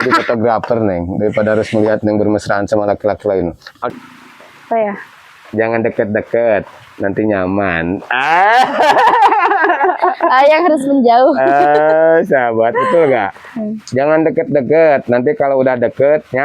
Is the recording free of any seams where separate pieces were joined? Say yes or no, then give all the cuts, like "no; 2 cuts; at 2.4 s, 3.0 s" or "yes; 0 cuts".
no; 1 cut; at 3.9 s